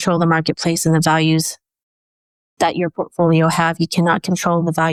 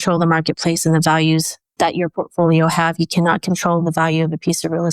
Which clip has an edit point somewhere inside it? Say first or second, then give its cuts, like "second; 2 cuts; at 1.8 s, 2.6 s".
second; 1 cut; at 1.6 s